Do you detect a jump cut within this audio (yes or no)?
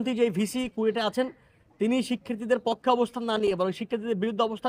no